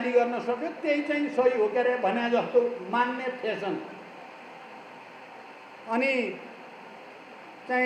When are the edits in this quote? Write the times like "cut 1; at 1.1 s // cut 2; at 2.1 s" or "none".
none

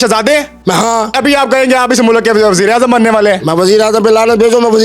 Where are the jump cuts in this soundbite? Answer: cut 1; at 1.1 s

